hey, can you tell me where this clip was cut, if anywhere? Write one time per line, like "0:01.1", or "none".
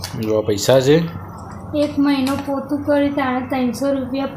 none